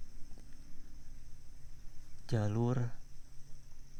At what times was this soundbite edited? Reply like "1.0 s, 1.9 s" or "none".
none